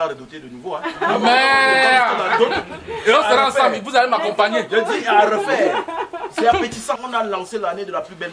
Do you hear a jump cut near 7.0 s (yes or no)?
yes